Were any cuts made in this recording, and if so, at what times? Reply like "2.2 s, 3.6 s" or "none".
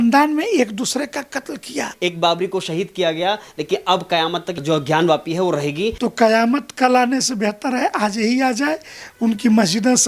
1.9 s, 4.6 s, 5.9 s